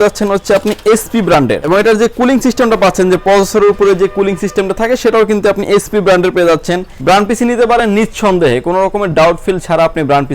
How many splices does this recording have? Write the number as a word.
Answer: two